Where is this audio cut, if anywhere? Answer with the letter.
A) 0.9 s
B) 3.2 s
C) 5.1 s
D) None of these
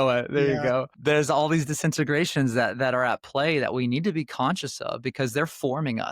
A